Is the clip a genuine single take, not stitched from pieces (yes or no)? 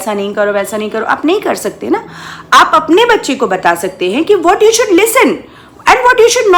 yes